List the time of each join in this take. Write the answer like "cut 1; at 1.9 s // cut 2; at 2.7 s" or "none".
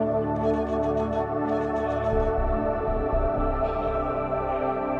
cut 1; at 2.6 s